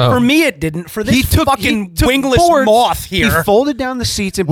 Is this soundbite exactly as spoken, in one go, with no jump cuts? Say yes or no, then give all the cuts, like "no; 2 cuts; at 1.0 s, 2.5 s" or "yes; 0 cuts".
yes; 0 cuts